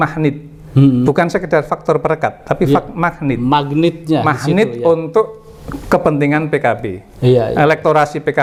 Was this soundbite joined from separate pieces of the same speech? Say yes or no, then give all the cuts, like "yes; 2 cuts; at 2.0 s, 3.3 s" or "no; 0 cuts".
no; 0 cuts